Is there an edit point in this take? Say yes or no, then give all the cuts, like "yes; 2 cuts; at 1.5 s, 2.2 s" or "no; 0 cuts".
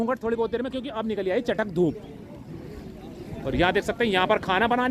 no; 0 cuts